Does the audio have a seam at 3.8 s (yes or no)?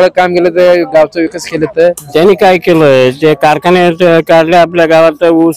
no